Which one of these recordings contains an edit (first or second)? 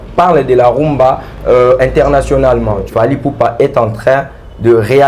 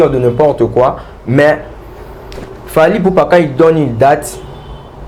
first